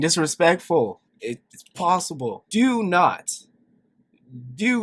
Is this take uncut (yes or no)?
no